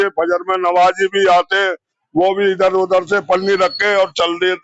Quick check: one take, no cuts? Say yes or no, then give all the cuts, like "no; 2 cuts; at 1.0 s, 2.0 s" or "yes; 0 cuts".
yes; 0 cuts